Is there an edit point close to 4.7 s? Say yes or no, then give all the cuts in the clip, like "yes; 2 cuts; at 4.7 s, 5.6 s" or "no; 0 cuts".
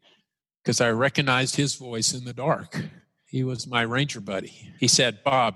yes; 2 cuts; at 3.2 s, 4.7 s